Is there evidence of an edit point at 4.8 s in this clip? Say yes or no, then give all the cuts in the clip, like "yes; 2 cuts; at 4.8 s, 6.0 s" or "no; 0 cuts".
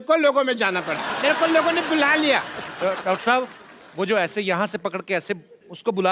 no; 1 cut; at 1.1 s